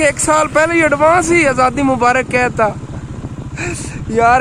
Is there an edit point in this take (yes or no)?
no